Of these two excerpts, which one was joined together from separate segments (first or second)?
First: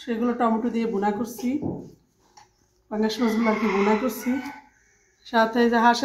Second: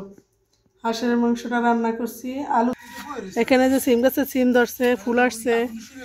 second